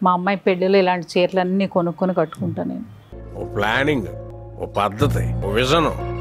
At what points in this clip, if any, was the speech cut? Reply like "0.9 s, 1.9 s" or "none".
none